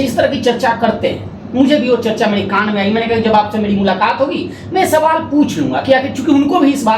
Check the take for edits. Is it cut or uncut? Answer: uncut